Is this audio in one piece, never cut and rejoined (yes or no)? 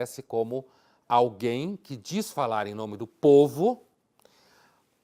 yes